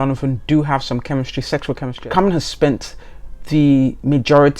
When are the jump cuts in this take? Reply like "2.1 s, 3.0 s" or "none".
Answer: 1.9 s